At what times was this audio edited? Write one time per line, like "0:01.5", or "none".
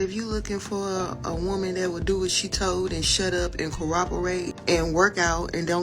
0:04.5